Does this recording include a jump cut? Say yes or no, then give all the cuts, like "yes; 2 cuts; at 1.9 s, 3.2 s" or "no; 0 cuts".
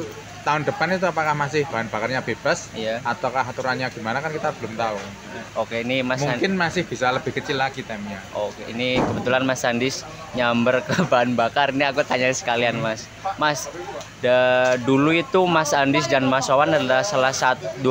no; 0 cuts